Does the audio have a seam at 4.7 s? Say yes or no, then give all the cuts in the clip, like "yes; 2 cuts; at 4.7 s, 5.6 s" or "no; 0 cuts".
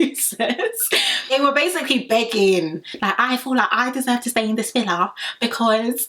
no; 1 cut; at 1.3 s